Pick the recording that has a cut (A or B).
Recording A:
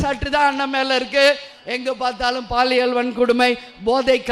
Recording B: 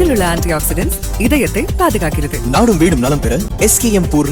A